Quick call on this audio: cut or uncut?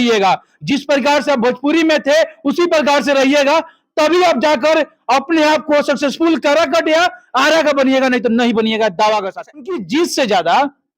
cut